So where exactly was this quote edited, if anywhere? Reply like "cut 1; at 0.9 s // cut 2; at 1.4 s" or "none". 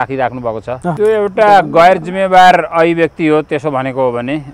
cut 1; at 0.9 s